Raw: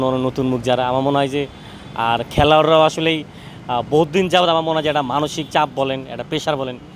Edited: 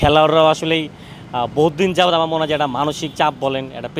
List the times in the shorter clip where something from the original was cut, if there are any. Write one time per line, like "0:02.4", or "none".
none